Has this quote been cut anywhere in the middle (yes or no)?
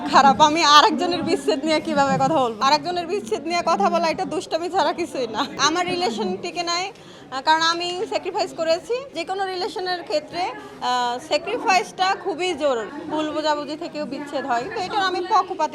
yes